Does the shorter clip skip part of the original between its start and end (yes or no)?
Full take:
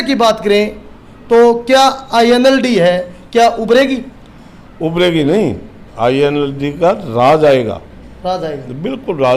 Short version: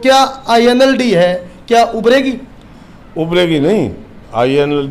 no